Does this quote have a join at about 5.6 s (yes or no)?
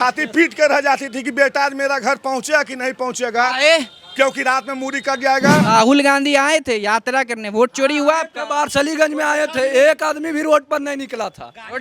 yes